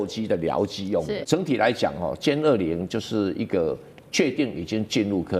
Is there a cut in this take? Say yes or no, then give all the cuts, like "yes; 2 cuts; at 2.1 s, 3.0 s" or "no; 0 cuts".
yes; 1 cut; at 1.2 s